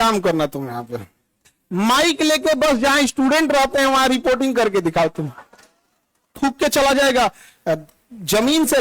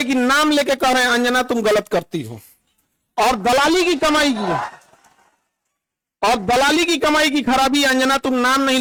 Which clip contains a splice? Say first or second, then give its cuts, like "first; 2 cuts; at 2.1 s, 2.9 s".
first; 1 cut; at 6.3 s